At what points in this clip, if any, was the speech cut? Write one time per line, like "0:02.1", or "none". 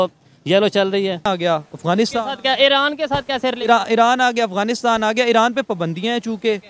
0:01.3